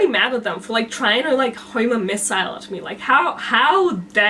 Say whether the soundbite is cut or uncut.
uncut